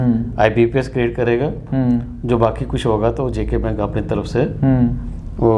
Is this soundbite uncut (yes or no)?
yes